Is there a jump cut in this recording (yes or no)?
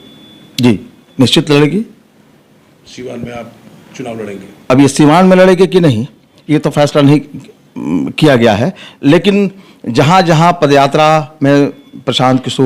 no